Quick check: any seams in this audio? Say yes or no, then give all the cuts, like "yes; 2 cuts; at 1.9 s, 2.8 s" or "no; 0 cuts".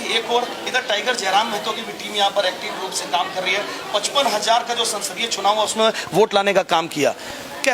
no; 0 cuts